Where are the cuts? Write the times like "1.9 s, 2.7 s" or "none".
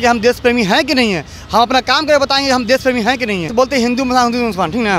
3.5 s